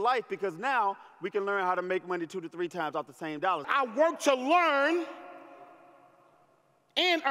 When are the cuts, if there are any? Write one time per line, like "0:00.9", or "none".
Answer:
0:03.7